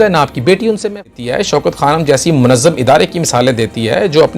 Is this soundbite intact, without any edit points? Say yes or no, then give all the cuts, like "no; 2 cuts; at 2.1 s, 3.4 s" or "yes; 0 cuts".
no; 1 cut; at 1.0 s